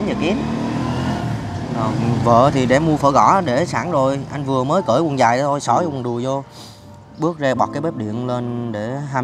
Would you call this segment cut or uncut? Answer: uncut